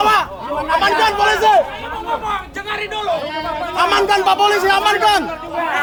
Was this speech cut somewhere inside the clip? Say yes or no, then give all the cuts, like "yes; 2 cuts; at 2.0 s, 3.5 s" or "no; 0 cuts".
no; 0 cuts